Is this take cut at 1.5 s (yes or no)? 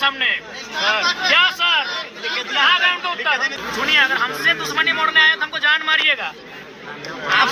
no